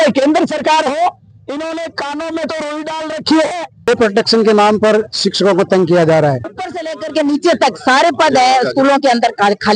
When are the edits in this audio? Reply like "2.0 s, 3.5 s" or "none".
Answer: 3.7 s, 6.5 s